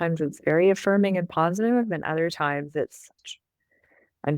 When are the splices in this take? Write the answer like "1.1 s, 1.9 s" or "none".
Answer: 3.1 s